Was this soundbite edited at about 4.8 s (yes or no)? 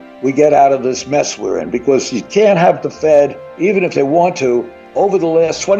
yes